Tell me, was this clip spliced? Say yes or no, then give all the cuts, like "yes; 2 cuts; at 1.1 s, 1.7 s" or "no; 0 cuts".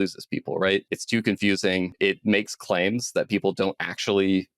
yes; 2 cuts; at 1.0 s, 1.9 s